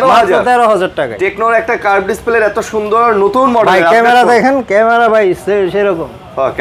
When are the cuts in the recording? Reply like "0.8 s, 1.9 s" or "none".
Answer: none